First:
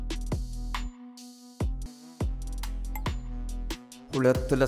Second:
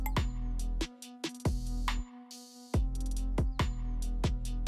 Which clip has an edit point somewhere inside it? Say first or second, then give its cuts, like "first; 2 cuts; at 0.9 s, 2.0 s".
first; 1 cut; at 1.9 s